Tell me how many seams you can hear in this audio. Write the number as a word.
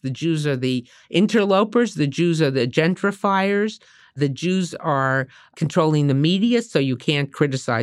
two